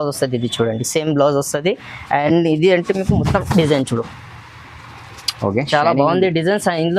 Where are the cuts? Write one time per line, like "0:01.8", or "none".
none

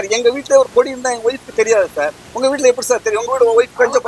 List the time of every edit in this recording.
none

